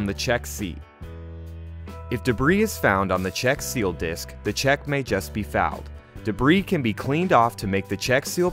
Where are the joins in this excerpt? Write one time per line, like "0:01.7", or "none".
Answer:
none